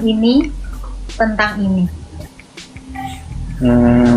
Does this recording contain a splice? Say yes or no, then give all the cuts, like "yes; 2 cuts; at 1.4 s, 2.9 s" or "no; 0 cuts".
no; 0 cuts